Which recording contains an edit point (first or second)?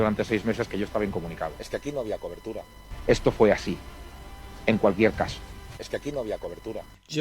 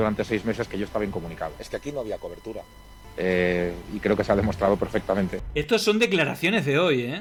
first